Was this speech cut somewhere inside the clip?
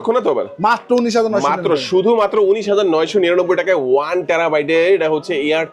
no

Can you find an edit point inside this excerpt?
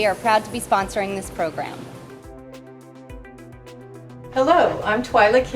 yes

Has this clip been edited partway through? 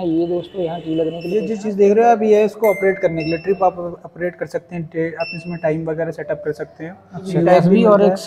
yes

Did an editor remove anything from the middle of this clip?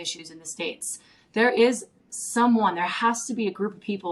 no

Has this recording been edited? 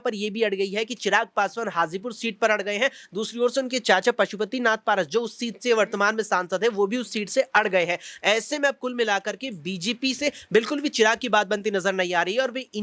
no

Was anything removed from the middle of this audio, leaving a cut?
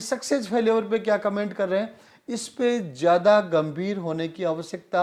no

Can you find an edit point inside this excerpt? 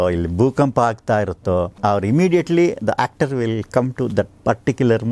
yes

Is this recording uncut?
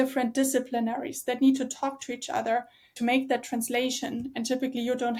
yes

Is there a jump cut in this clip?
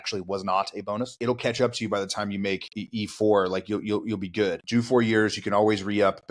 yes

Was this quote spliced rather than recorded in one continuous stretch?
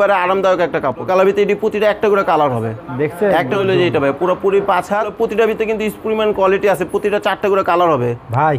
yes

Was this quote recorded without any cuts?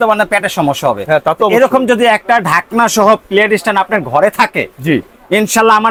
yes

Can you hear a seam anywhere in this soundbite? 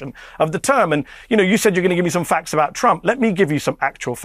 no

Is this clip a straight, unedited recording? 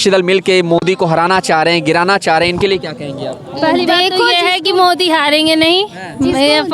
yes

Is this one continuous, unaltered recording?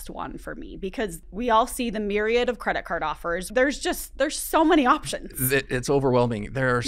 no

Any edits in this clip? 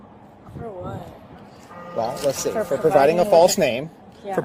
no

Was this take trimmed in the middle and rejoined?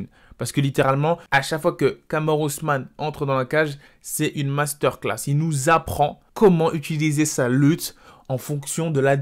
yes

